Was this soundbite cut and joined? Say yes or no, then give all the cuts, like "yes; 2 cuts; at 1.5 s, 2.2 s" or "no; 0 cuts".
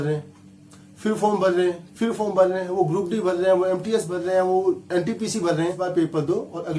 yes; 1 cut; at 5.8 s